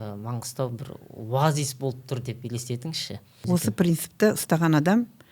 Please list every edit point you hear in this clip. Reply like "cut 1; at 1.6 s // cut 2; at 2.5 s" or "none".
cut 1; at 3.4 s